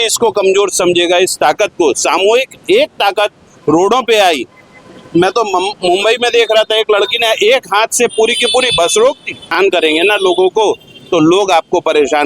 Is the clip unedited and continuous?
no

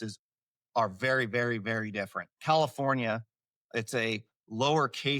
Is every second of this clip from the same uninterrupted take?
no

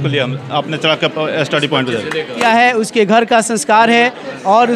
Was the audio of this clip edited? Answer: yes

